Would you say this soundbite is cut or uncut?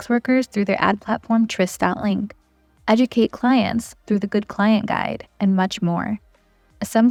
uncut